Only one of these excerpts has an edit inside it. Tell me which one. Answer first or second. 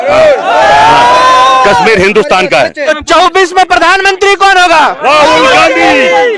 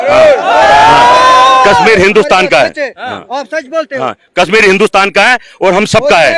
first